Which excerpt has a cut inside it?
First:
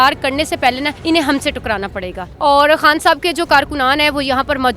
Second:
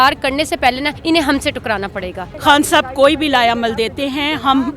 second; 1 cut; at 2.3 s

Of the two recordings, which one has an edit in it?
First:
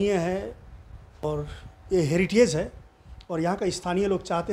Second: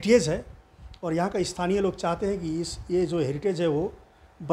first; 1 cut; at 1.2 s

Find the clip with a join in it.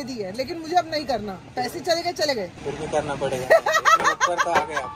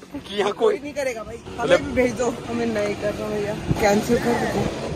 second; 2 cuts; at 1.4 s, 2.4 s

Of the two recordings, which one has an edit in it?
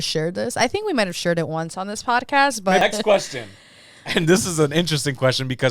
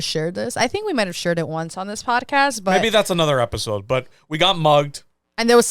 first; 1 cut; at 2.8 s

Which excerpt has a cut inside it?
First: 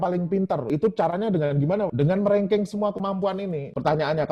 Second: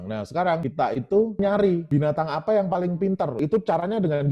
second; 1 cut; at 1.4 s

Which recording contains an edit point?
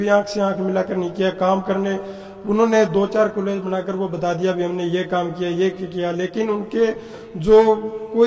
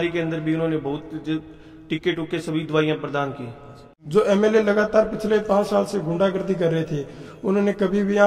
second; 1 cut; at 4.0 s

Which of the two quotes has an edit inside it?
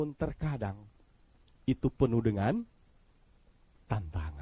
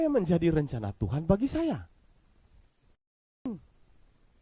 second; 1 cut; at 3.5 s

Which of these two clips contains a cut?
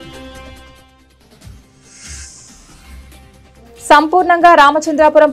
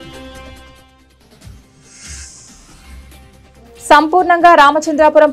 first; 2 cuts; at 1.6 s, 3.9 s

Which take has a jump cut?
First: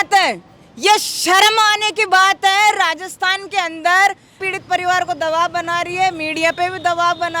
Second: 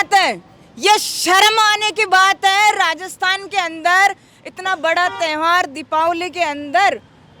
first; 1 cut; at 4.5 s

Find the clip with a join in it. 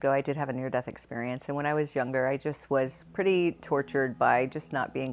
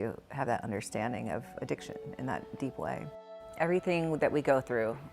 second; 1 cut; at 3.1 s

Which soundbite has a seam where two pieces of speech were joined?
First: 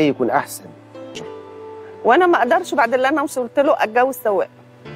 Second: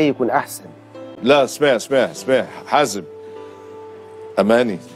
first; 1 cut; at 1.2 s

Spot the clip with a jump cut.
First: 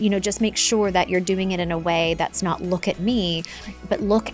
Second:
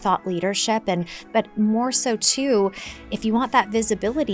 second; 1 cut; at 1.2 s

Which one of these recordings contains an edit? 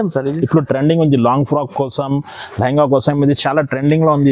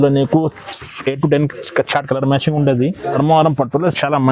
second; 1 cut; at 3.2 s

